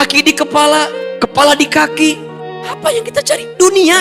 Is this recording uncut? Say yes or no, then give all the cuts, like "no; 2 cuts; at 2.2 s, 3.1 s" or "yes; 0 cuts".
yes; 0 cuts